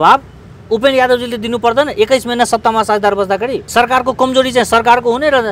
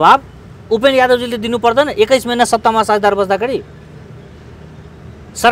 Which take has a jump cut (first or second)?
first